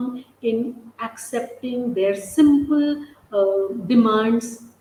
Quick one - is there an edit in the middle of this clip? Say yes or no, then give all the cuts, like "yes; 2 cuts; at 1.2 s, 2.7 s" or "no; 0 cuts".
no; 0 cuts